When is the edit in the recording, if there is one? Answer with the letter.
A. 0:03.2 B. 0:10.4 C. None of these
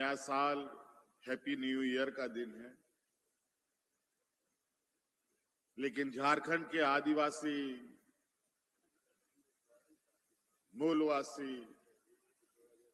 C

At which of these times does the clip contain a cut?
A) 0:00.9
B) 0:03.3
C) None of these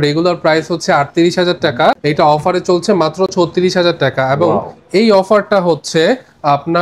C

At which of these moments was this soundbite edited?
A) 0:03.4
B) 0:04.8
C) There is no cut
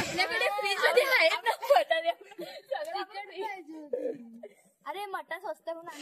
C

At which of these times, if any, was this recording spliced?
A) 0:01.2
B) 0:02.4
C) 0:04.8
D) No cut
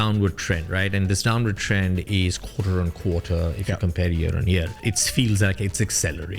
C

